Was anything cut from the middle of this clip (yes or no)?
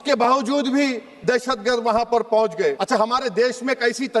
yes